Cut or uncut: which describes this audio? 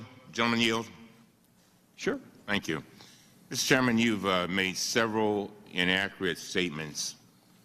cut